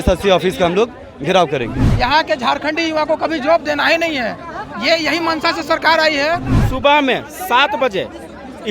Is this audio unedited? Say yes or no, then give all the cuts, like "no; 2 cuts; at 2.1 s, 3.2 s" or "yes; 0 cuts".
no; 2 cuts; at 1.8 s, 6.5 s